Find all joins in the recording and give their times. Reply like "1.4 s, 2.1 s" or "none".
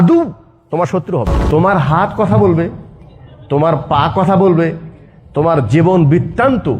1.4 s